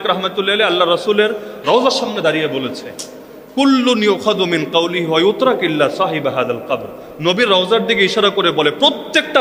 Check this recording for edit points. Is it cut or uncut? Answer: uncut